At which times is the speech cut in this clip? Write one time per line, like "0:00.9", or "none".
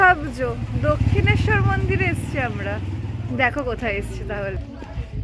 none